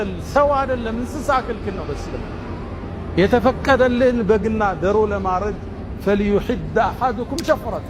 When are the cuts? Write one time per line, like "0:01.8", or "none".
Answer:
none